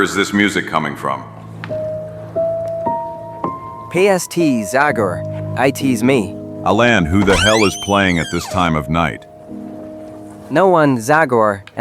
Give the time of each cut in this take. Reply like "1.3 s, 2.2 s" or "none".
10.3 s